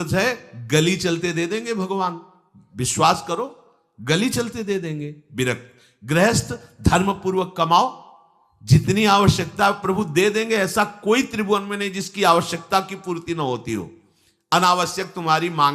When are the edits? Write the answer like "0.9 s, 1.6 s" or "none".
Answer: none

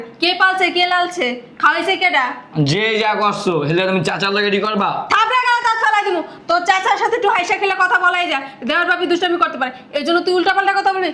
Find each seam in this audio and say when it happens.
none

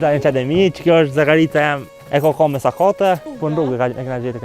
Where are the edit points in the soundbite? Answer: 1.9 s, 3.3 s

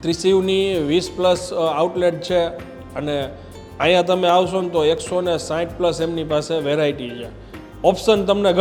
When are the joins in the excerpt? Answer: none

